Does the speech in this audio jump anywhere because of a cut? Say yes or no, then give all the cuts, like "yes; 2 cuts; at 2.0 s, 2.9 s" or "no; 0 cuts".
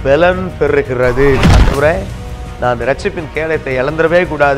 yes; 1 cut; at 1.5 s